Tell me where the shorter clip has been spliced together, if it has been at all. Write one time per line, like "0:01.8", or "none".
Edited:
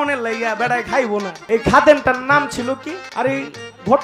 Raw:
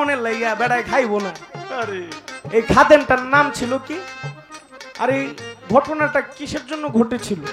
0:01.4
0:03.0